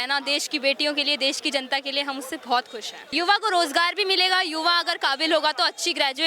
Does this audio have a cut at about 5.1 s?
no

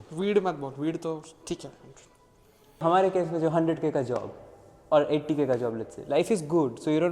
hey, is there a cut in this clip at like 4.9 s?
no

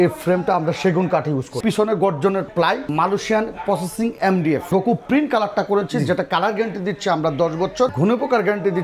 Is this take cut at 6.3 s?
no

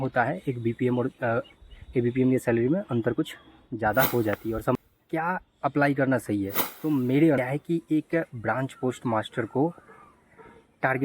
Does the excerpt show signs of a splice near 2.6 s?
no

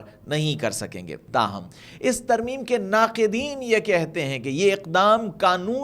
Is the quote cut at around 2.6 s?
no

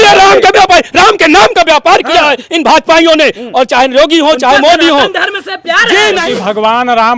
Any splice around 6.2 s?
yes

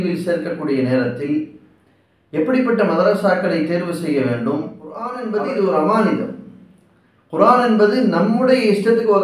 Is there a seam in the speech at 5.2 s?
yes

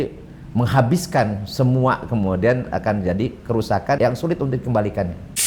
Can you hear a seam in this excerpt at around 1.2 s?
no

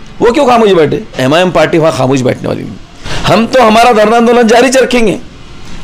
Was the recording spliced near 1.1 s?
yes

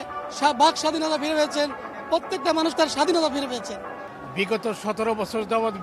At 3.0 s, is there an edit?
no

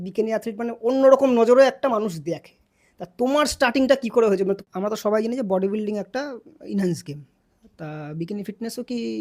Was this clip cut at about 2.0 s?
no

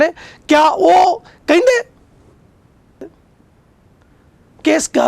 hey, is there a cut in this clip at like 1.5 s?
no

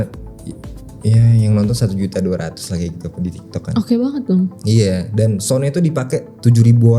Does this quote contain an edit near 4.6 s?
no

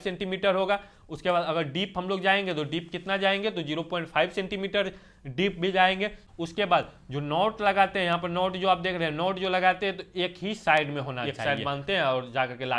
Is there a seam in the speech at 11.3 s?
yes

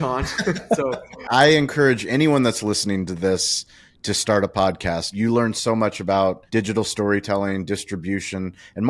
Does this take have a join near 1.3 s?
yes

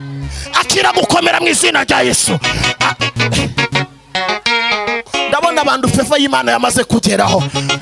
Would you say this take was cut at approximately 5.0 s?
yes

